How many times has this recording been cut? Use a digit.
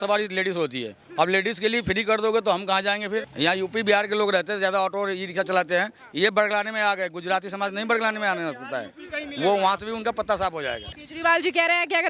2